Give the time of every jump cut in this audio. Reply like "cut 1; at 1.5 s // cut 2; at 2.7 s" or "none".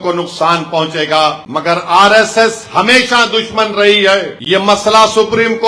cut 1; at 1.4 s // cut 2; at 4.3 s